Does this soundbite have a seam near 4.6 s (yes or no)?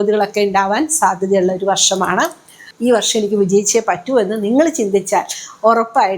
no